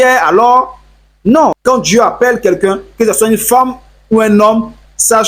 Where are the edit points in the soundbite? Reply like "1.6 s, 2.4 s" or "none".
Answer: 1.6 s